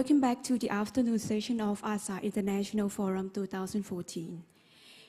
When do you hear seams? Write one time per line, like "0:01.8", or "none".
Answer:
0:02.2